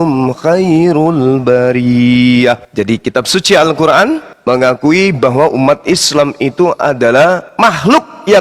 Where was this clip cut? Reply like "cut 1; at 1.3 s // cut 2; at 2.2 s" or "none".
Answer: cut 1; at 2.7 s // cut 2; at 4.3 s // cut 3; at 7.5 s